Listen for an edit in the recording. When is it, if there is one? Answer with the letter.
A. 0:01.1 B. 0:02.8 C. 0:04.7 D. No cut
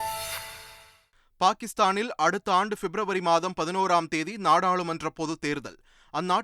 A